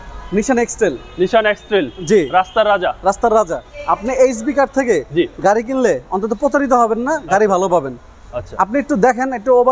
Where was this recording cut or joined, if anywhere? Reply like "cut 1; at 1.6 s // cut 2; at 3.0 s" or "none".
cut 1; at 3.7 s